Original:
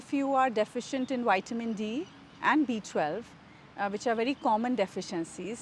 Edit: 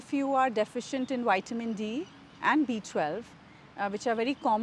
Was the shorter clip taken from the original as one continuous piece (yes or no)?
yes